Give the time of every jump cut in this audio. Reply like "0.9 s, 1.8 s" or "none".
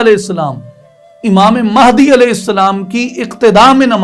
none